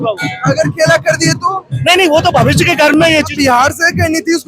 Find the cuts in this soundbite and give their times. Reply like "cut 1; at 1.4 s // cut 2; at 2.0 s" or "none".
cut 1; at 3.3 s